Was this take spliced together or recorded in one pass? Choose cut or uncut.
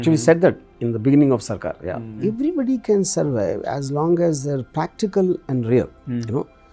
cut